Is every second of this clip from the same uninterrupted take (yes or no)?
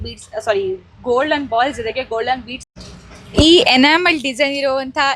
no